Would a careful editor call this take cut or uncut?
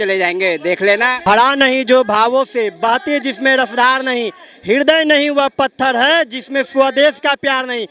cut